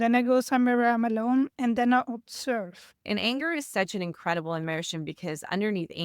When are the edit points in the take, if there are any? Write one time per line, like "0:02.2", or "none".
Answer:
0:03.1